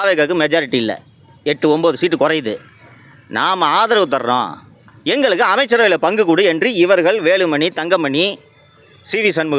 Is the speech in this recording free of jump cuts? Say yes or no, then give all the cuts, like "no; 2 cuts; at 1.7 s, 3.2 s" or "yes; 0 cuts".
yes; 0 cuts